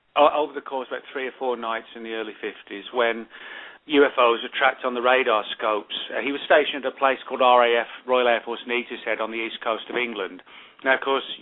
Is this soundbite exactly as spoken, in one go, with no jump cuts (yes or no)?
yes